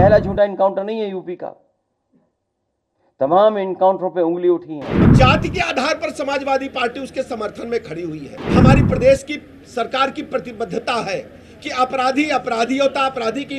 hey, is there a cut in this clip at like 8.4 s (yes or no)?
yes